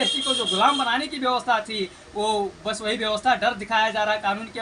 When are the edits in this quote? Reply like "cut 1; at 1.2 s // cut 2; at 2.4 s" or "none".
none